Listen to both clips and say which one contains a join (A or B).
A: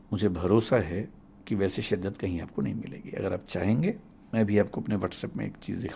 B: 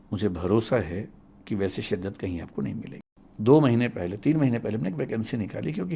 B